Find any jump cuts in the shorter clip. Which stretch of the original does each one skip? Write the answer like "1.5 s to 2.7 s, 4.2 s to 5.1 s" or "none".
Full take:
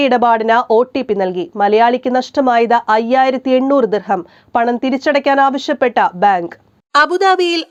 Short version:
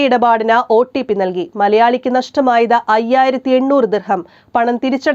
none